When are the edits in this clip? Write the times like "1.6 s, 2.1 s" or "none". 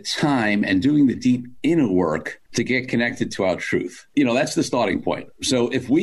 4.0 s